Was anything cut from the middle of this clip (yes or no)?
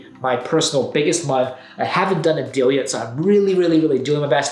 no